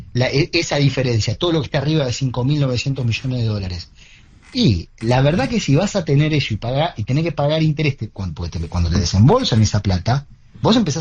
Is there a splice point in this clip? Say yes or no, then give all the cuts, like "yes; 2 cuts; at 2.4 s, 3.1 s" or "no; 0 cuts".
no; 0 cuts